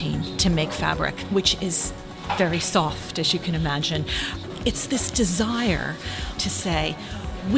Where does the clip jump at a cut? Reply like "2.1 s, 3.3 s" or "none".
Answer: 6.4 s